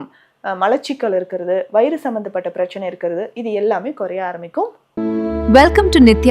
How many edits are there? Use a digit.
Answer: 1